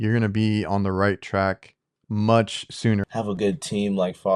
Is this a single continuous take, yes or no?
no